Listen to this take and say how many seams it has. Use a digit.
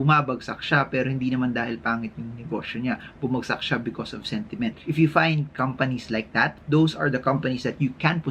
1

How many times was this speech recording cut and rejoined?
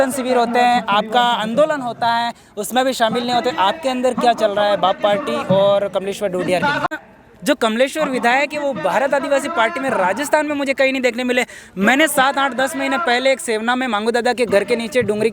1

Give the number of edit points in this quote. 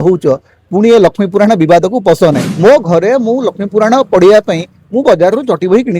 1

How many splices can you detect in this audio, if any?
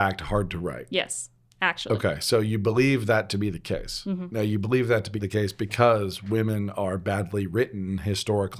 2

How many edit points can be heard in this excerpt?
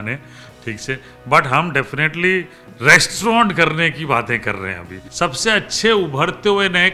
1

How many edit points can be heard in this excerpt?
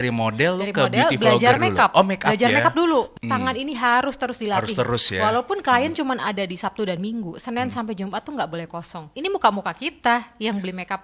2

